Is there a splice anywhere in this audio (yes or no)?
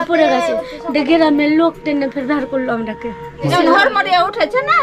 yes